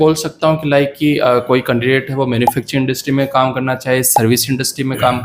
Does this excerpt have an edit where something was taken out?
no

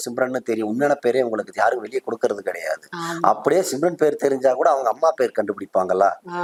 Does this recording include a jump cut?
no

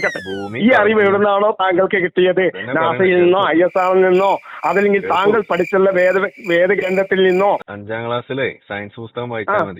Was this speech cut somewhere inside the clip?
yes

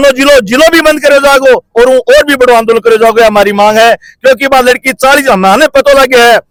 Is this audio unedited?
yes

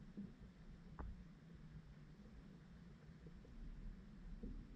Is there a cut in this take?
no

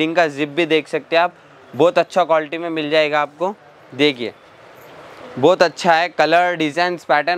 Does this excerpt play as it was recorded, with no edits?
yes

